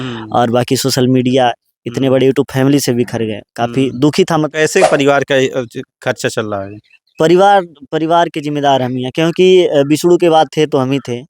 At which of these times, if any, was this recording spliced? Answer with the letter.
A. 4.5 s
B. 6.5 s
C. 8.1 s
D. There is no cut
A